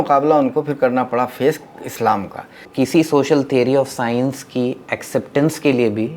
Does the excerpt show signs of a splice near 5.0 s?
no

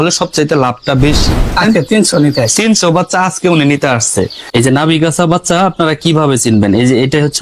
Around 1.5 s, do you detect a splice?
yes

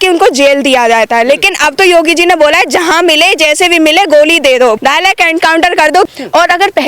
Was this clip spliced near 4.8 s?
yes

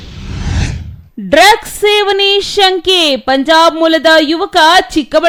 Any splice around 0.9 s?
no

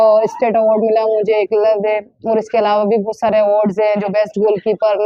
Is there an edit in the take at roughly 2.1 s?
no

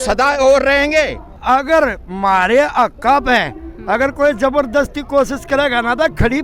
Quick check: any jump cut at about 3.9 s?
no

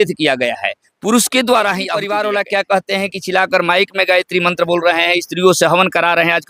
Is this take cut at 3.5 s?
no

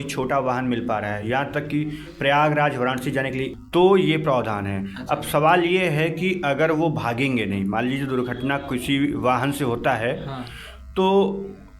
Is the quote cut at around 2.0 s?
no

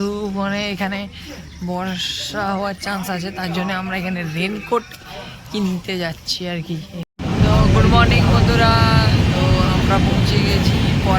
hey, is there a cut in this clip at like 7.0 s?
yes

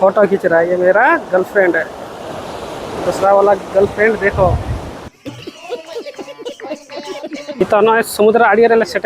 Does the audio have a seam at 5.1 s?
yes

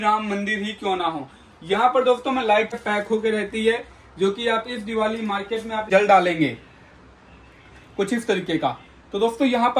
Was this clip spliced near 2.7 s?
yes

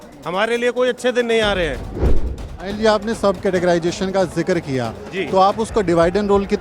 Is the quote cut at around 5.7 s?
no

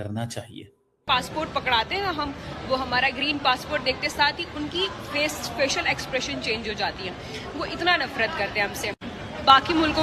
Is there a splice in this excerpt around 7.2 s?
no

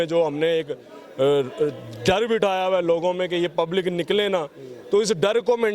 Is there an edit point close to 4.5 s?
no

